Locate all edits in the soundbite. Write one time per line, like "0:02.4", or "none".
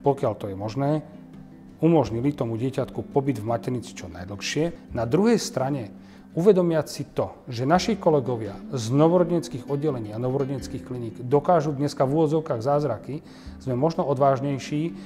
0:04.8